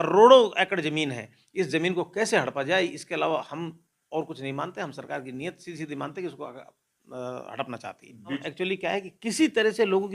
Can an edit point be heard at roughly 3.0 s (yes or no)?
no